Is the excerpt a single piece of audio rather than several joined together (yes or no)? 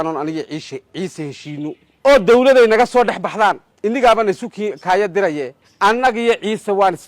no